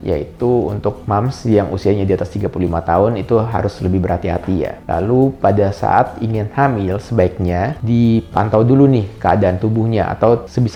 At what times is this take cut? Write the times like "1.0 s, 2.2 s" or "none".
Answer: none